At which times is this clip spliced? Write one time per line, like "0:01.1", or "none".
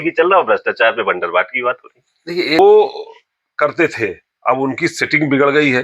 0:02.6